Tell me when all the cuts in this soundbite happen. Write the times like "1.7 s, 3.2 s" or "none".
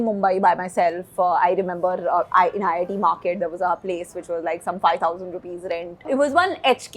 6.0 s

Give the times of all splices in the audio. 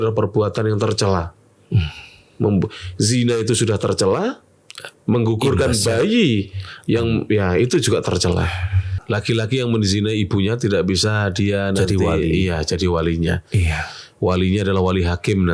8.9 s

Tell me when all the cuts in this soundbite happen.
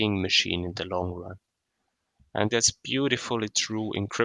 2.5 s

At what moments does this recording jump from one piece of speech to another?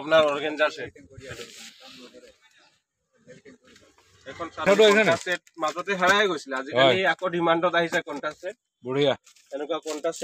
4.7 s

